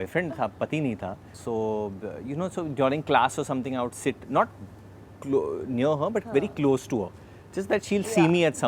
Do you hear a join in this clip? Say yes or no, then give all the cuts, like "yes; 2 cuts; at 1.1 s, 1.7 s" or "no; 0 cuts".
no; 0 cuts